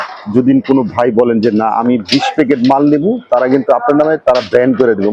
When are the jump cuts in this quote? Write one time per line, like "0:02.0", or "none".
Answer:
none